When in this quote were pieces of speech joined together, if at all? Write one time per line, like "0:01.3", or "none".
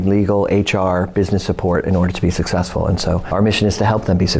0:03.2